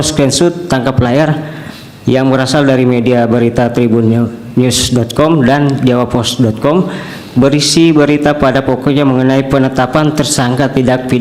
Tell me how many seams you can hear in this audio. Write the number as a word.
zero